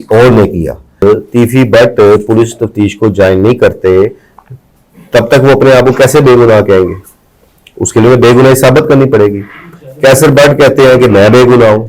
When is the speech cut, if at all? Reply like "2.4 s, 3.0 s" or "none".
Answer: 1.0 s

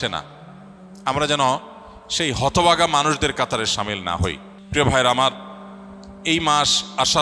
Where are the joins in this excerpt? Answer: 4.5 s

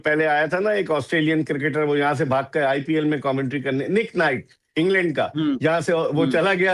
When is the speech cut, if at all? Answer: none

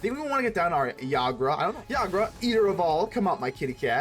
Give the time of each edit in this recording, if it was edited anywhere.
1.8 s

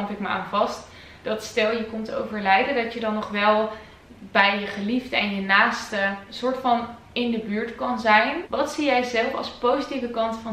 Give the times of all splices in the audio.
6.2 s, 8.4 s

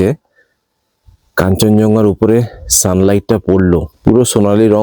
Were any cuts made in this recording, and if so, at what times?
3.9 s

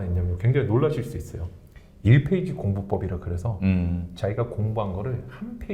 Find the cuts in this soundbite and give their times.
none

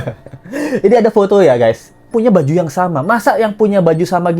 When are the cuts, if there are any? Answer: 2.1 s

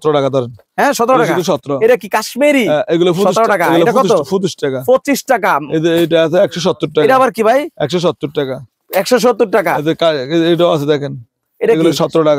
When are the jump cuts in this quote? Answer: none

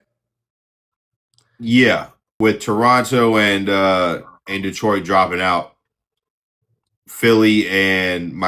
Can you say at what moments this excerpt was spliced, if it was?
2.2 s

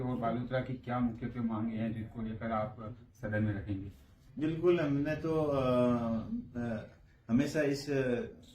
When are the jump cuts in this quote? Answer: 4.3 s

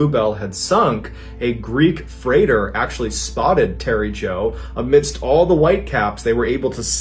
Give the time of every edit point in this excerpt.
none

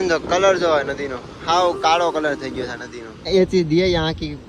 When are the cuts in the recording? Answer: 3.3 s

